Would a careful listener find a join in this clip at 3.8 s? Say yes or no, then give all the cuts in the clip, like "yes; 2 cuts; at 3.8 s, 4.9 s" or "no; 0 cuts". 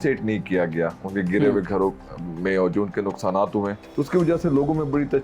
yes; 1 cut; at 3.8 s